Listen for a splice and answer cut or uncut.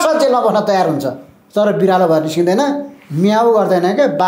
uncut